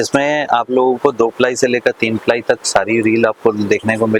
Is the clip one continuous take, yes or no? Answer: yes